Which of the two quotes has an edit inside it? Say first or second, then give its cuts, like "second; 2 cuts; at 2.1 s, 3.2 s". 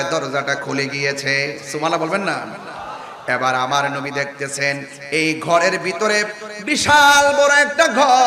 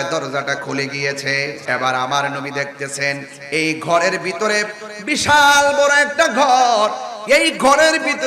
second; 1 cut; at 1.6 s